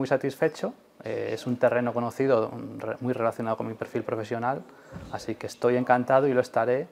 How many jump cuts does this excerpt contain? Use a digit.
0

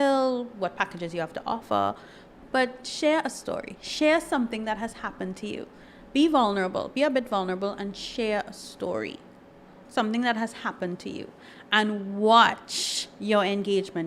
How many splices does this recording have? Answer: 1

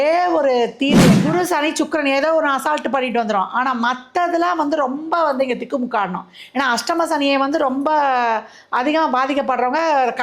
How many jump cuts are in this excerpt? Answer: 1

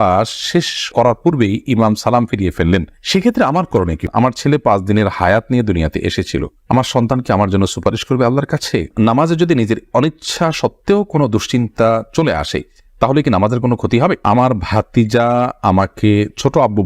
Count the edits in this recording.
3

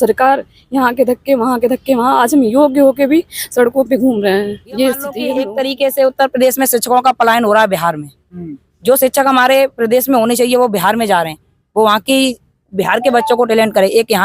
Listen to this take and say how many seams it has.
1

